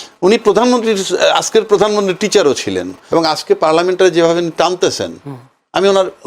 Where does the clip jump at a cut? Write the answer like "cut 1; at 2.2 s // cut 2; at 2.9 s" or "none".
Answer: cut 1; at 2.9 s